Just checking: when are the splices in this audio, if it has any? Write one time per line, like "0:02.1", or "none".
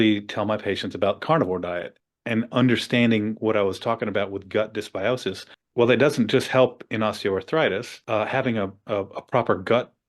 0:01.9

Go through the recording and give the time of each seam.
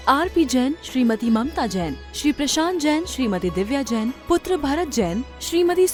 none

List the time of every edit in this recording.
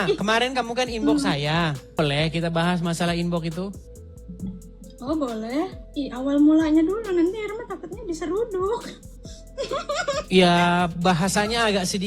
0:02.0
0:05.8

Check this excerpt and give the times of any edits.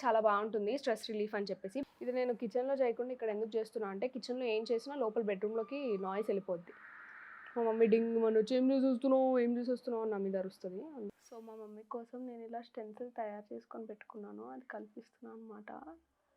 0:01.9
0:11.2

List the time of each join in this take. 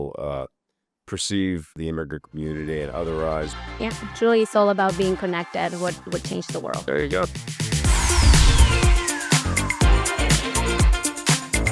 0:01.7
0:03.8
0:07.6

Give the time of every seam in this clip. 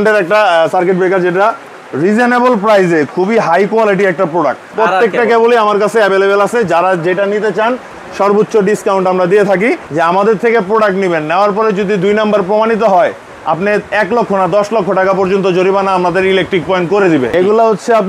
0:04.7
0:09.8
0:17.3

